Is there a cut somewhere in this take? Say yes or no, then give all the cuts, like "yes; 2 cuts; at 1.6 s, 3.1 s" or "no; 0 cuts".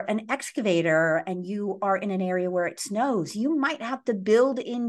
no; 0 cuts